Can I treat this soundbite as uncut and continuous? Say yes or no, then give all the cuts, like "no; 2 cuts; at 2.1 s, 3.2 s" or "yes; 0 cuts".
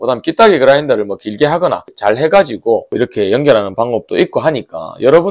no; 2 cuts; at 1.9 s, 2.9 s